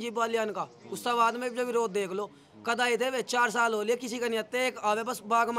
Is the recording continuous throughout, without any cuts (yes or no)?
yes